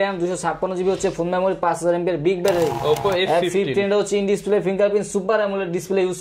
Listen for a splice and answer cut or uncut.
cut